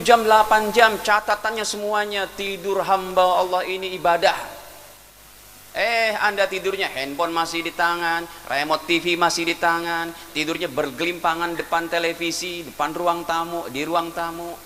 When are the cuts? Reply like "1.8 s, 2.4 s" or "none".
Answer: none